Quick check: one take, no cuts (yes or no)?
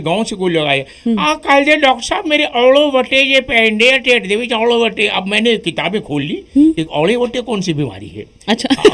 yes